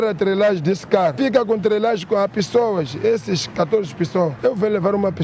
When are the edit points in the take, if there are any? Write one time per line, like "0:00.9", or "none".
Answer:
0:01.1
0:04.3

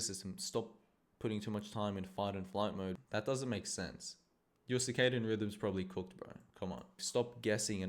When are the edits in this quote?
0:03.0
0:07.0

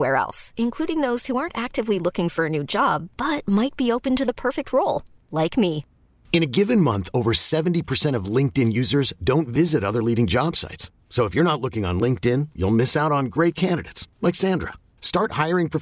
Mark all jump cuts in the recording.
none

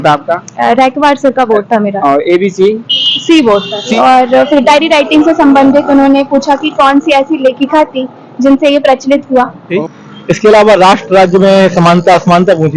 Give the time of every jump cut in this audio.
0:03.9
0:09.7
0:10.9

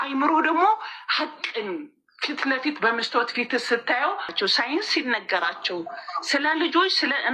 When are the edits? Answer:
0:04.3

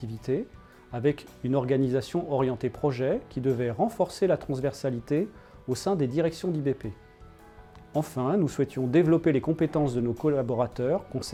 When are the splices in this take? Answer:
none

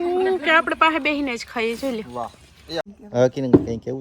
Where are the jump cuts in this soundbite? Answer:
0:02.8

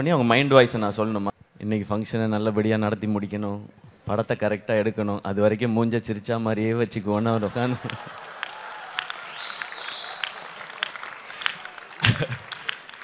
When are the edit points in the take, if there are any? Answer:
0:01.3

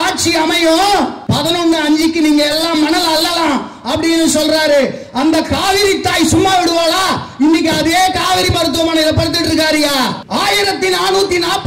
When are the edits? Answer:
0:01.2
0:10.2

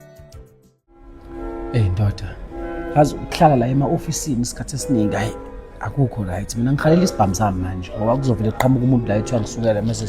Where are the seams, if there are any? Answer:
0:01.1

